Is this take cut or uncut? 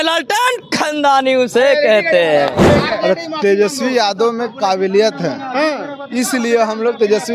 cut